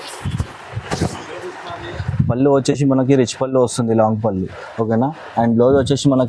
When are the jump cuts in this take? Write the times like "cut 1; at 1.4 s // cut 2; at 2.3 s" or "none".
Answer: none